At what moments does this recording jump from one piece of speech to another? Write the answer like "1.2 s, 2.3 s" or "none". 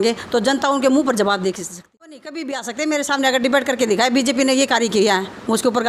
1.7 s